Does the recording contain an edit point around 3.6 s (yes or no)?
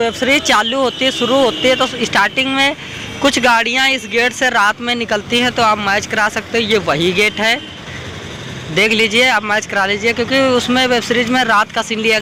no